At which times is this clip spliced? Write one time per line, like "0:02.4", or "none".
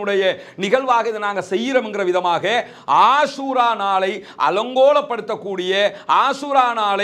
none